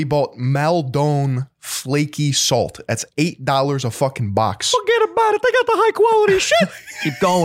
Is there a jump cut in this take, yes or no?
no